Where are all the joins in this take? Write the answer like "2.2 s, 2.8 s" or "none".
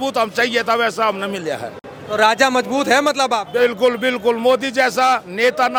none

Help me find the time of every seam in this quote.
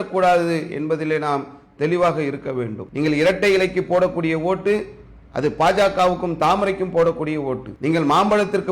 2.8 s, 7.7 s

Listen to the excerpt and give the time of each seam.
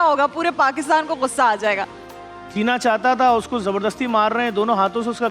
1.8 s

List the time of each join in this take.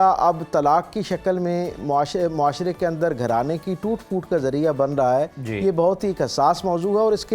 none

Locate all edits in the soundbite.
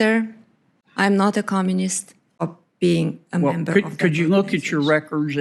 2.5 s

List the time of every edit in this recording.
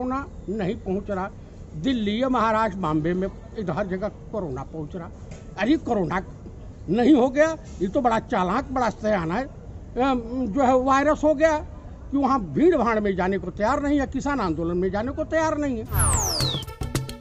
16.0 s

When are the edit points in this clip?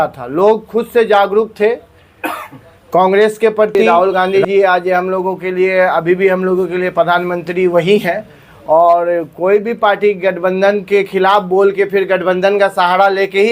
3.8 s

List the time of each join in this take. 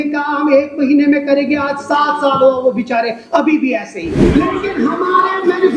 4.2 s

